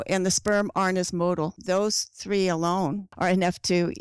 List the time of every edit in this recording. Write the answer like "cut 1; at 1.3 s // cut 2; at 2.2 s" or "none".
cut 1; at 1.6 s // cut 2; at 3.1 s